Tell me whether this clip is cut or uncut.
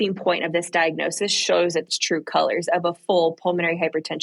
cut